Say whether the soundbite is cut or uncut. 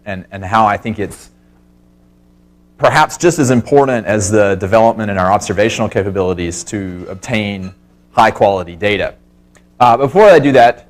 uncut